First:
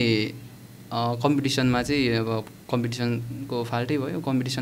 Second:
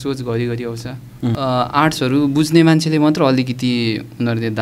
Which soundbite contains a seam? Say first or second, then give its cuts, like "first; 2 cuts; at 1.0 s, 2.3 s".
second; 1 cut; at 1.4 s